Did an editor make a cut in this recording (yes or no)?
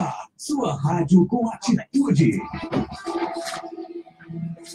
yes